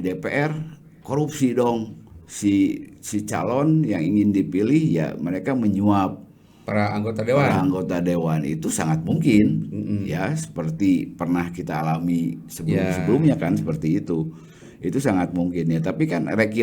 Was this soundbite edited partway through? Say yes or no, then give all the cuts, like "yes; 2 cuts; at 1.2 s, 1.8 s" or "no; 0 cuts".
no; 0 cuts